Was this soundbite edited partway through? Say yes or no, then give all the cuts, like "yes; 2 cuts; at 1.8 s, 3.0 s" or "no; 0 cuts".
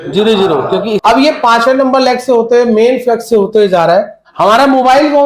yes; 2 cuts; at 1.0 s, 4.2 s